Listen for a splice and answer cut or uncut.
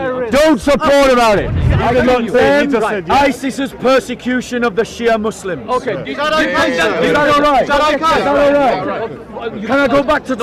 cut